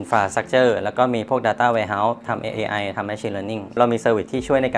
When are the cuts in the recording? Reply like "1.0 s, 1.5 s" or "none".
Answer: 2.2 s, 3.8 s